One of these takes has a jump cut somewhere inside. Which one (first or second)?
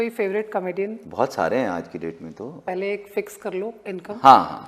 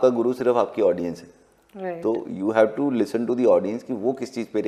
first